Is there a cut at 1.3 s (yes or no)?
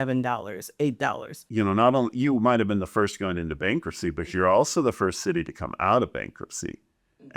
yes